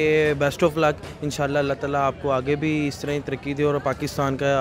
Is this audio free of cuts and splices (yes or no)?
yes